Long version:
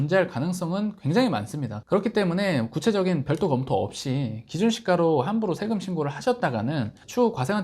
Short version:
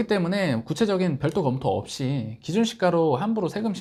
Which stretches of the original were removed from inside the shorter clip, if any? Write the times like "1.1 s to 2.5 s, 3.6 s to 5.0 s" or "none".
none